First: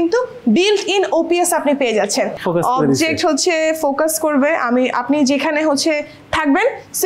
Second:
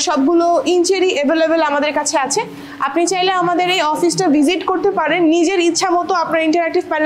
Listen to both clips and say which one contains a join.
first; 1 cut; at 2.3 s

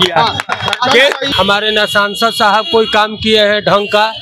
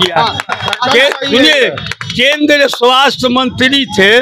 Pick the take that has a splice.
first; 1 cut; at 1.2 s

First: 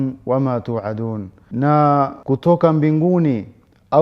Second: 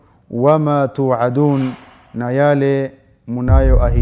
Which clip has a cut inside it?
first; 2 cuts; at 1.3 s, 2.2 s

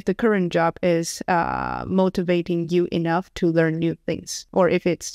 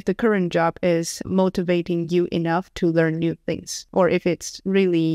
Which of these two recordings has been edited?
second; 1 cut; at 1.2 s

